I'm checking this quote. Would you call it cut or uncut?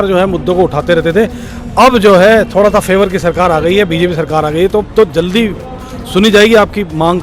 uncut